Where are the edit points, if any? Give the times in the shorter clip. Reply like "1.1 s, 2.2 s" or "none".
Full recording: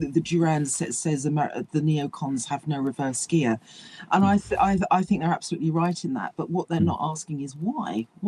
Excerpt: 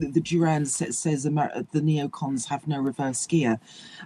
none